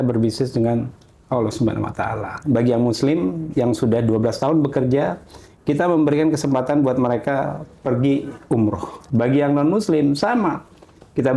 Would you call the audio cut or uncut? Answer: cut